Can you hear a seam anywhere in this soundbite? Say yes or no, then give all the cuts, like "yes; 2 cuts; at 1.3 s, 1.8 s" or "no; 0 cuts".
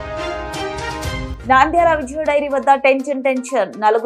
no; 0 cuts